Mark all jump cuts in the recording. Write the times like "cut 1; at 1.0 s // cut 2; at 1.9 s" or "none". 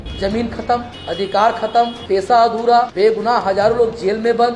cut 1; at 0.9 s // cut 2; at 2.0 s // cut 3; at 2.9 s